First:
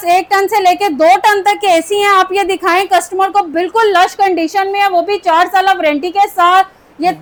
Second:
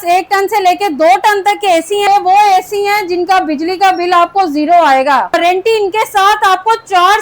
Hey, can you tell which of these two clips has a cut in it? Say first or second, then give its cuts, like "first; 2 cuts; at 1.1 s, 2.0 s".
second; 2 cuts; at 2.1 s, 5.3 s